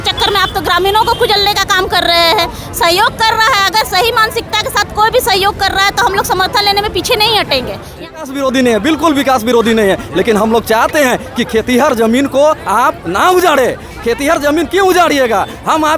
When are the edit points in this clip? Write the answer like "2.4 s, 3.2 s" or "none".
8.2 s